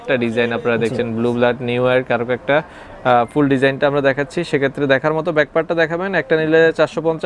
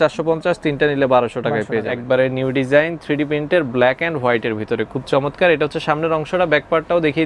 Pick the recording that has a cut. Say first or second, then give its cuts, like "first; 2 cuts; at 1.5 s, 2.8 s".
second; 1 cut; at 1.9 s